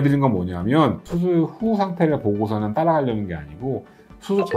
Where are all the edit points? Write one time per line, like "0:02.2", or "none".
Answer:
0:01.0

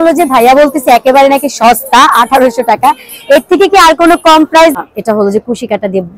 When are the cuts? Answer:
0:04.8

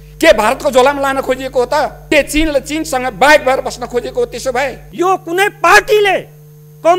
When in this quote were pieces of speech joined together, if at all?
0:02.0
0:04.8

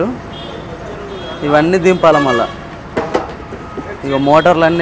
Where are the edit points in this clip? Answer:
none

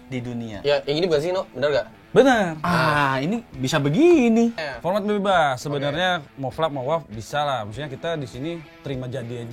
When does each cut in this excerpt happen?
0:04.6

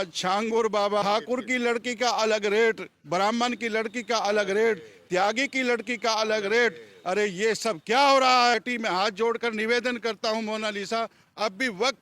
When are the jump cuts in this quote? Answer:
0:01.0
0:08.5

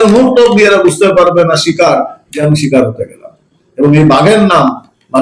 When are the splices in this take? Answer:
none

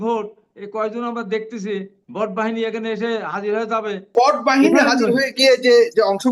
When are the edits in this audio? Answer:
0:04.1

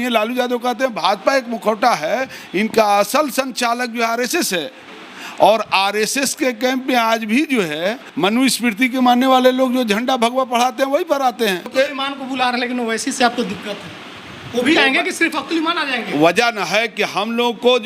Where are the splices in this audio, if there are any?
0:08.0
0:11.7

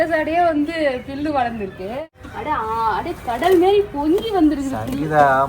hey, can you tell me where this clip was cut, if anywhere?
0:02.2

